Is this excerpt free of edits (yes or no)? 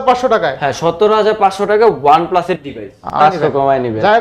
no